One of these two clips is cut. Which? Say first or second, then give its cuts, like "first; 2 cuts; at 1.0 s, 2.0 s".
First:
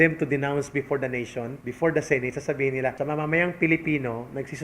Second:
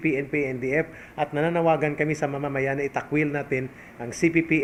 first; 2 cuts; at 1.6 s, 3.0 s